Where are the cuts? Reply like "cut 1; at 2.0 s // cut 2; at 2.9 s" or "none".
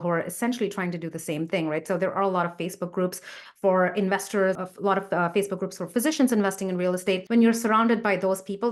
cut 1; at 4.6 s // cut 2; at 7.2 s